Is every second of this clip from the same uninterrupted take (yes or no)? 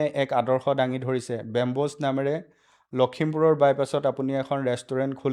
yes